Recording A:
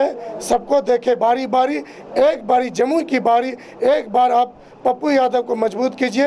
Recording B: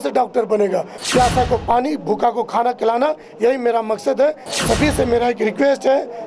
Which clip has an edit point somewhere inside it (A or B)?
B